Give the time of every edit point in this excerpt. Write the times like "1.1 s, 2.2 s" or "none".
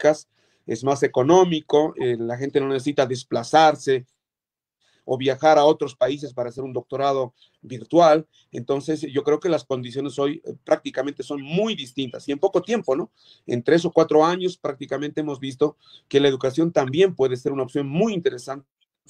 none